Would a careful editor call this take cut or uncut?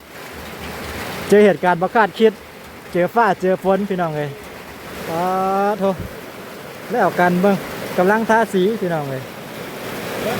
cut